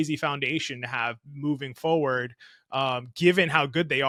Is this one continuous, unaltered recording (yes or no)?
yes